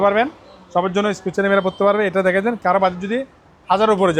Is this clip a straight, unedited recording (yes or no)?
yes